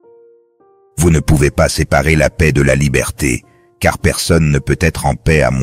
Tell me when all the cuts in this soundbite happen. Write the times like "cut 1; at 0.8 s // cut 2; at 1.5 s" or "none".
cut 1; at 1.0 s